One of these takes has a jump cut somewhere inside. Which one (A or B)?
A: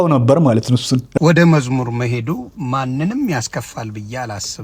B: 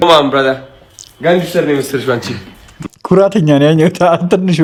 A